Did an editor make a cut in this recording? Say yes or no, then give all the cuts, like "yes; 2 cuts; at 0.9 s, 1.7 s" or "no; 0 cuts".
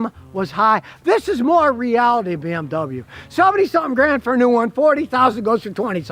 no; 0 cuts